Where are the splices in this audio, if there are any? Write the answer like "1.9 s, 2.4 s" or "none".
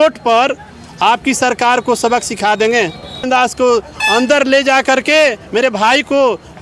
3.3 s